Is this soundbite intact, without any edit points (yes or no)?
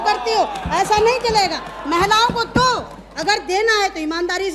yes